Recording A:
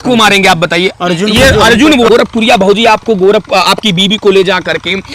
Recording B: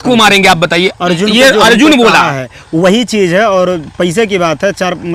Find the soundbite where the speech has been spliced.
A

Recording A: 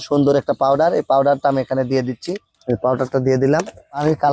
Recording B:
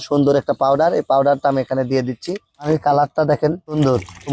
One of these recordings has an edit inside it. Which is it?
B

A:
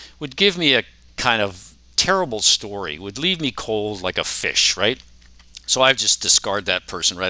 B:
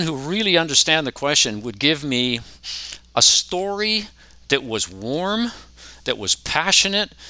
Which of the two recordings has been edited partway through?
A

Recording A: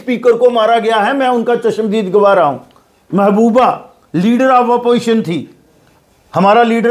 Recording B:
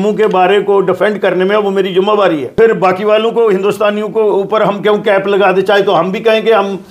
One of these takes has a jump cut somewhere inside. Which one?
B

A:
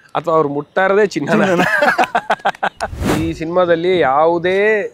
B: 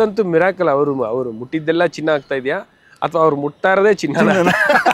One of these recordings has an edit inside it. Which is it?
A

